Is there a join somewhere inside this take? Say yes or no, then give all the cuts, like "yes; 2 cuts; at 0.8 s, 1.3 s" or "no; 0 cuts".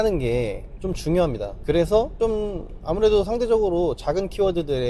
no; 0 cuts